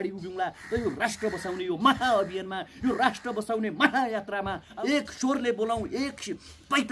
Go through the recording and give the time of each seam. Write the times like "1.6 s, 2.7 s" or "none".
4.7 s